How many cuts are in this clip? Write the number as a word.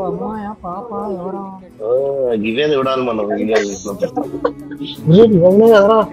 two